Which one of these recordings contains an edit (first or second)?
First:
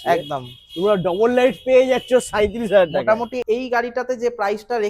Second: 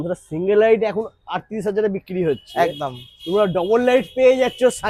first